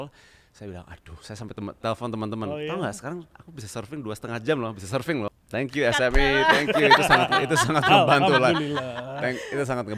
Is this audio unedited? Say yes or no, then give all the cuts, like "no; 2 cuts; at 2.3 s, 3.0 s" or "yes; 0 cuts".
no; 1 cut; at 5.3 s